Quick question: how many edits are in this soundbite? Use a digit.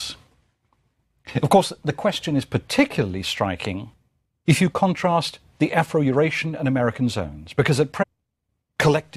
0